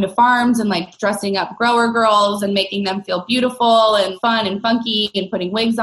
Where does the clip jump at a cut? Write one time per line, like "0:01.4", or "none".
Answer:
0:04.1